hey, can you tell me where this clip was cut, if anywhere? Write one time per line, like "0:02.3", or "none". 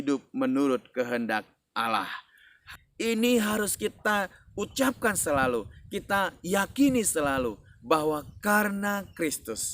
0:02.3